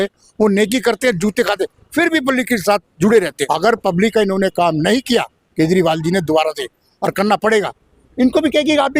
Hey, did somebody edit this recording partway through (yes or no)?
yes